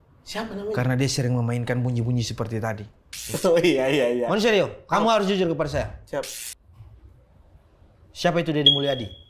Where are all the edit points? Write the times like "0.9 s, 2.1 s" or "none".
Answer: 3.3 s